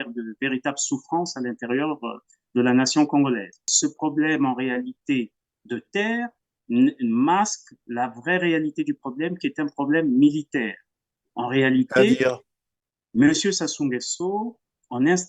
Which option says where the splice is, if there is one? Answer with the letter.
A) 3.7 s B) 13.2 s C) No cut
A